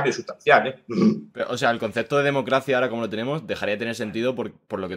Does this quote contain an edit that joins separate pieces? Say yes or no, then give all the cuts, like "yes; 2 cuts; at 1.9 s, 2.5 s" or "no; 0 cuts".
no; 0 cuts